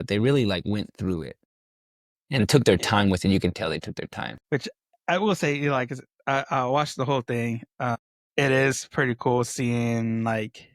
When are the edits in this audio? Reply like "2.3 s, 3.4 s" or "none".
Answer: 8.2 s